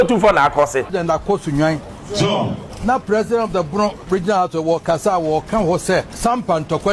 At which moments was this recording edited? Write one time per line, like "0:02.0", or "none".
0:00.9
0:02.7
0:06.1